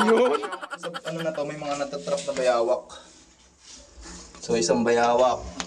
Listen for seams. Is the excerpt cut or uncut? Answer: cut